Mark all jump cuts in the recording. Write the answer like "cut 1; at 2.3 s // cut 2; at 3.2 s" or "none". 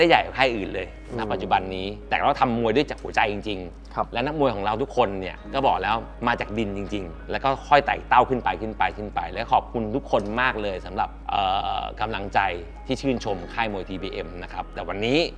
none